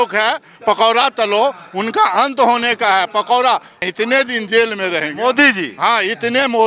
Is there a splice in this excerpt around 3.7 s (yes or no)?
yes